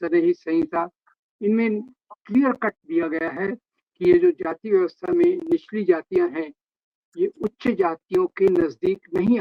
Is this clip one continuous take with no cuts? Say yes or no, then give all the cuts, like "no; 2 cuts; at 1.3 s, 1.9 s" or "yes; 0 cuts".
yes; 0 cuts